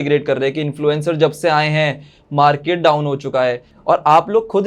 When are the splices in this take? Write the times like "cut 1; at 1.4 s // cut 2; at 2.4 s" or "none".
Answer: cut 1; at 3.7 s